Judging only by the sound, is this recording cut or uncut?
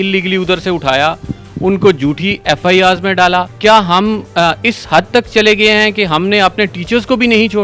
cut